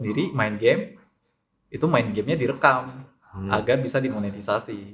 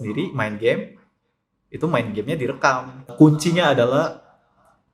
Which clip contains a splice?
second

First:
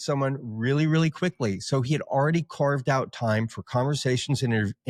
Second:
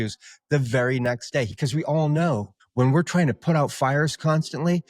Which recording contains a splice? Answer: second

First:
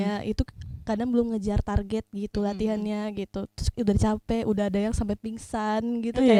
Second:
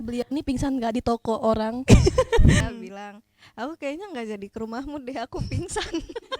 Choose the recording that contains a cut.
second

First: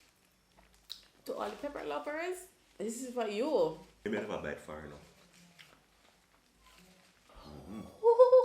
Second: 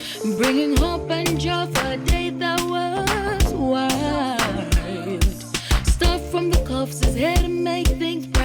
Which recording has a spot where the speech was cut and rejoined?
first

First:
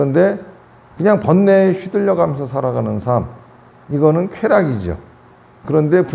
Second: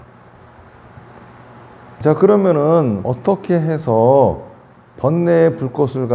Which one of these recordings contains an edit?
second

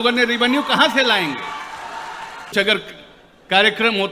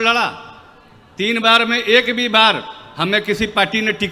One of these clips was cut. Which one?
first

